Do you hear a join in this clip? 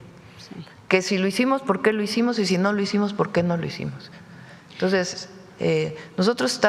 no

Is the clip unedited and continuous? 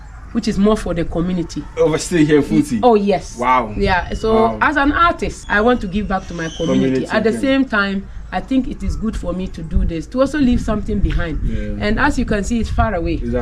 no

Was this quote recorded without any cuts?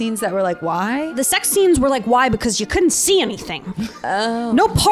no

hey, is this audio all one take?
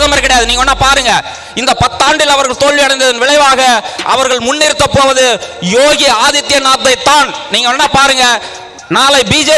yes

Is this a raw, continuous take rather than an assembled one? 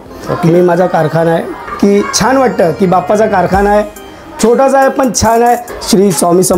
no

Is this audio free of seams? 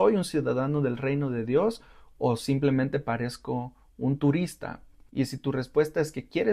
no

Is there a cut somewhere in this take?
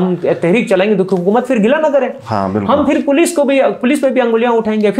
no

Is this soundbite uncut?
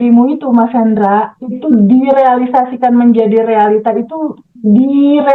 yes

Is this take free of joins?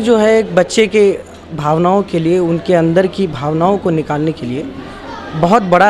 yes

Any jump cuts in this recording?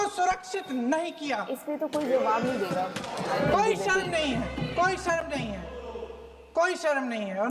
no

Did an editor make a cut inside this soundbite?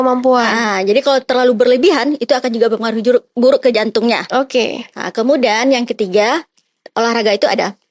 no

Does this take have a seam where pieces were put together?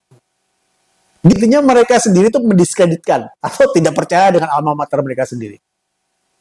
yes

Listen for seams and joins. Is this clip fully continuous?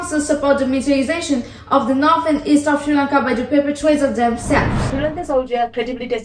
no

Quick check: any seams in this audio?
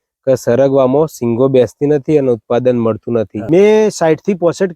yes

